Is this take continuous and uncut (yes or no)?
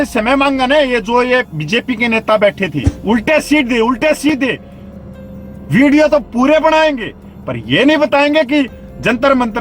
no